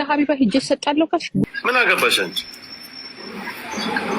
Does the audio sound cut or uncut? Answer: cut